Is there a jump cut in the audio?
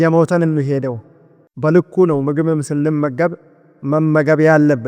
yes; 1 cut; at 1.4 s

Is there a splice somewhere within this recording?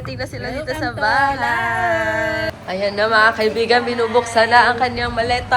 yes; 1 cut; at 2.5 s

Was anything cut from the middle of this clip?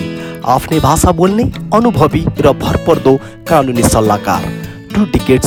no; 0 cuts

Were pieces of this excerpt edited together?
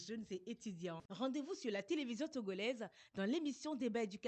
no; 0 cuts

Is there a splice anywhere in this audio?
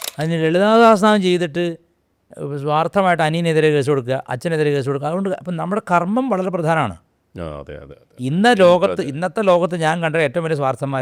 no; 0 cuts

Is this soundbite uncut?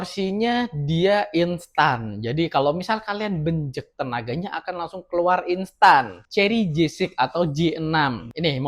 no; 1 cut; at 6.2 s

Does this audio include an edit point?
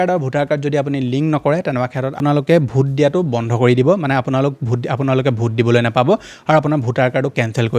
yes; 1 cut; at 2.2 s

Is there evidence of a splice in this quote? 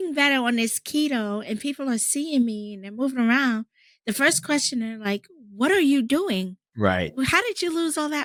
no; 0 cuts

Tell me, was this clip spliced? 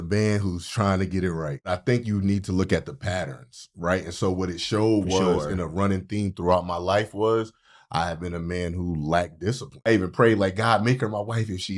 yes; 2 cuts; at 1.7 s, 9.9 s

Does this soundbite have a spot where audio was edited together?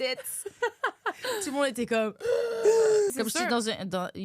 yes; 1 cut; at 3.1 s

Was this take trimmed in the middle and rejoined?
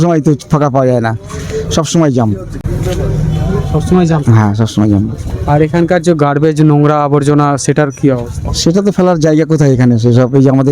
no; 0 cuts

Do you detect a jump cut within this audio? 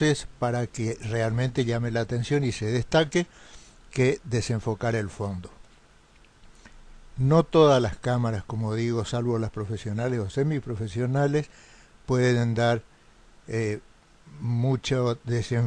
no; 0 cuts

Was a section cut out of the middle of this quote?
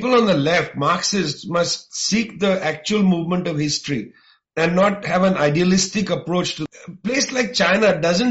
yes; 1 cut; at 6.6 s

